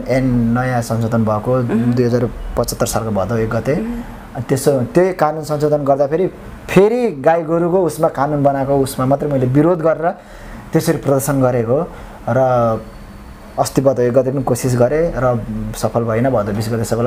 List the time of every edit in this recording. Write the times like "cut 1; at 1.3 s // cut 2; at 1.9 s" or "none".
none